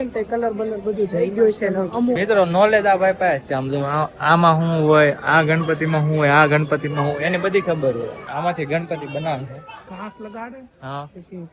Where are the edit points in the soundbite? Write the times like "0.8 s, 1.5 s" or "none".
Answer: 2.2 s, 8.3 s